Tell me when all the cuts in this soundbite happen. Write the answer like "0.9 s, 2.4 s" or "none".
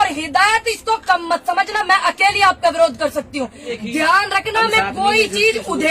3.7 s